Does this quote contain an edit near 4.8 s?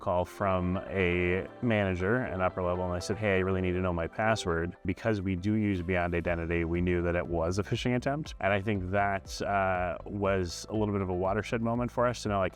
yes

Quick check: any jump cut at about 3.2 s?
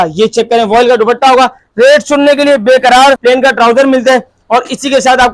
yes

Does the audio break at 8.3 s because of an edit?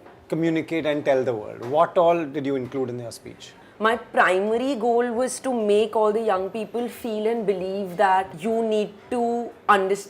yes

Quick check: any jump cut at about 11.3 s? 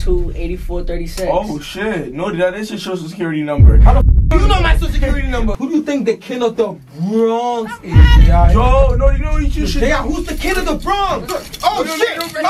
yes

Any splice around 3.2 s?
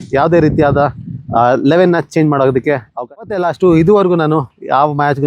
yes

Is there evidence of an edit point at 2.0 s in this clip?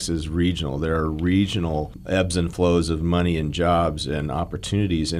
yes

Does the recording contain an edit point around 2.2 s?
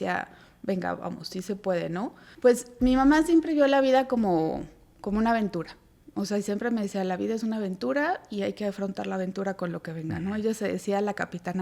yes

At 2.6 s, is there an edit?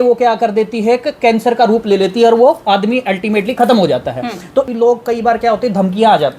no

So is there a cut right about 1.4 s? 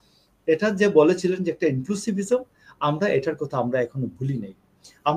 no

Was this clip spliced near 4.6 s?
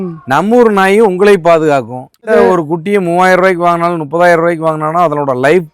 no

